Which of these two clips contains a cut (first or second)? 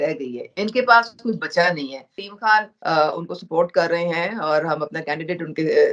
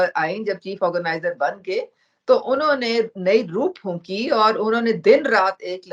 first